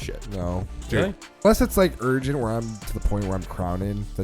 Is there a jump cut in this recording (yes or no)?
yes